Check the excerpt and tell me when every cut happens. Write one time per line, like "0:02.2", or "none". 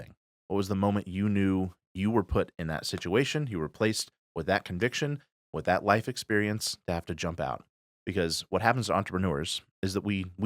none